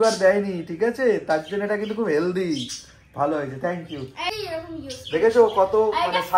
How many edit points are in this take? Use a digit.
1